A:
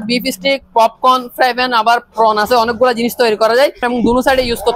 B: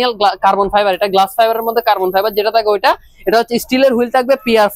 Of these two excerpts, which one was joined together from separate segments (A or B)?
A